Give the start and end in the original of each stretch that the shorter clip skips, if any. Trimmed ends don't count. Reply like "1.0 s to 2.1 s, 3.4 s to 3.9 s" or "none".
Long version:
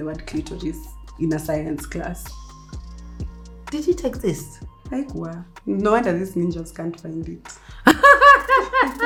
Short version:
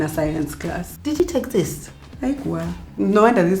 2.4 s to 3.8 s